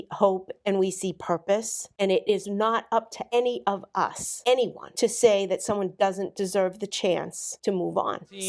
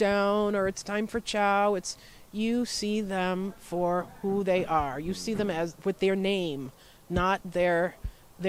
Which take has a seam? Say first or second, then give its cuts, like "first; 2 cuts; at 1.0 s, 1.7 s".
first; 5 cuts; at 1.9 s, 3.2 s, 4.3 s, 4.8 s, 7.4 s